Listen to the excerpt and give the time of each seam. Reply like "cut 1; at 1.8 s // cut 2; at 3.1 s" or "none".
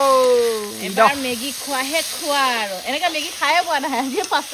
none